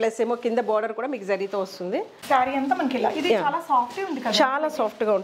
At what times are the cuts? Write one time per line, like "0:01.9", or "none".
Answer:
0:02.2